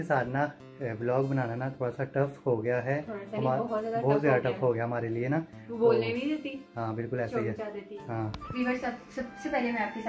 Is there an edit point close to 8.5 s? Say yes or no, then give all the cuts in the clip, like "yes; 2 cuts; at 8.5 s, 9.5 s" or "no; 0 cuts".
yes; 1 cut; at 8.5 s